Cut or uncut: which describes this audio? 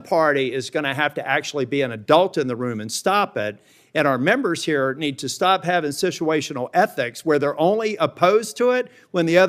uncut